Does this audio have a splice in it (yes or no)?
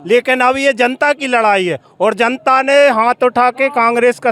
no